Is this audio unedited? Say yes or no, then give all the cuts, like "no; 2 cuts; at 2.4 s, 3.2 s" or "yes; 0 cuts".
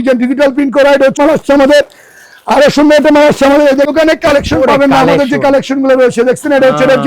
no; 2 cuts; at 1.2 s, 3.9 s